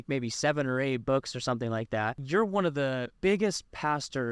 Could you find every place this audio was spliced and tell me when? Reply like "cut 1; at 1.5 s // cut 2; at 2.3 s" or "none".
cut 1; at 2.2 s // cut 2; at 3.1 s